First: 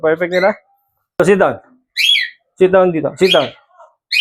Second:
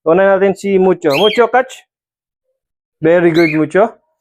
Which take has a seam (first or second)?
first